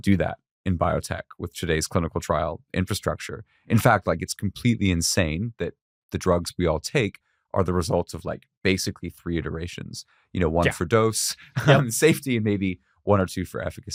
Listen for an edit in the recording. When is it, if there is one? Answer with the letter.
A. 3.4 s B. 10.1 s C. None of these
C